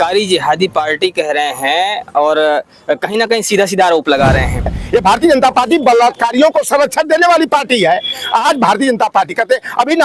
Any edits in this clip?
yes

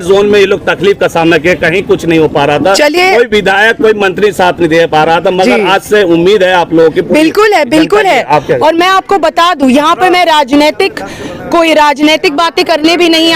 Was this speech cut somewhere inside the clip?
no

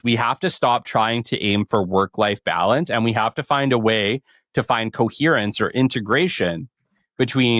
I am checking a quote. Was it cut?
no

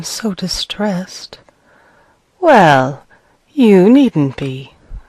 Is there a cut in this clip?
yes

